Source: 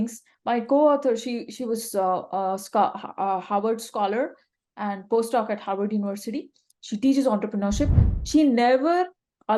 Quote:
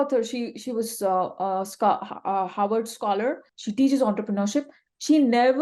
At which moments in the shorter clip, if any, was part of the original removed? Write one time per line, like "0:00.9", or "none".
0:03.5

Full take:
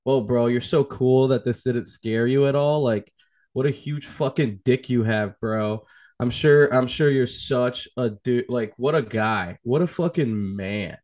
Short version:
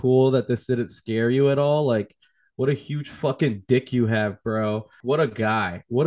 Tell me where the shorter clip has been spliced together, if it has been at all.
0:05.0

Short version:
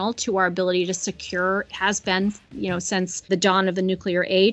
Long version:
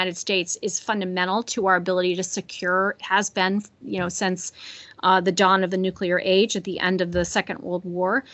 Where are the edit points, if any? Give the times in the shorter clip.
0:03.3

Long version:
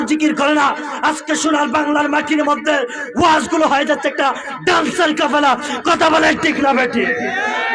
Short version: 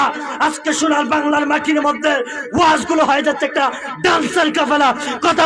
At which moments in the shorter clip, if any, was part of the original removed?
none

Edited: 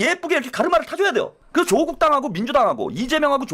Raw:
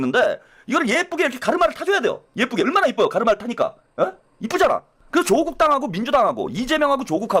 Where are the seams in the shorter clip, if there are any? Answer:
0:01.4

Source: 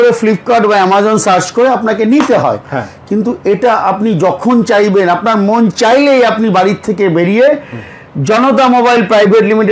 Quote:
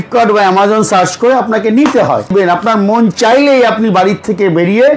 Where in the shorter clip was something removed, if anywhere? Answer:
0:02.3

